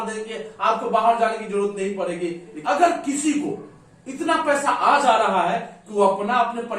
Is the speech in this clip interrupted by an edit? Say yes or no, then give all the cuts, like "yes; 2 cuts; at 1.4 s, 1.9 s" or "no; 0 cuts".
yes; 1 cut; at 2.5 s